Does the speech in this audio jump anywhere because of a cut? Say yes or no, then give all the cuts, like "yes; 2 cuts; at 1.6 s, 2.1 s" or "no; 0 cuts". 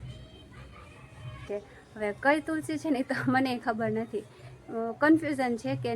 yes; 1 cut; at 1.5 s